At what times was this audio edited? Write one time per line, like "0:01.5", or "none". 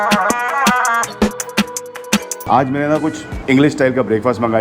0:02.3